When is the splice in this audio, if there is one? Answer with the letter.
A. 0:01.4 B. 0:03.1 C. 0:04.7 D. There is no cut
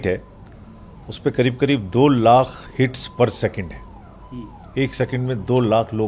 D